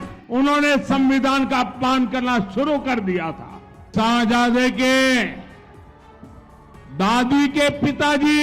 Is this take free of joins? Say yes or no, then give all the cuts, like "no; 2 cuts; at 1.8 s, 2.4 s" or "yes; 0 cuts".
no; 1 cut; at 3.9 s